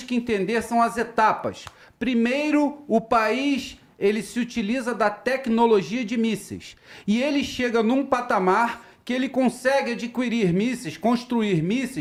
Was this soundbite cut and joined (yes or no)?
no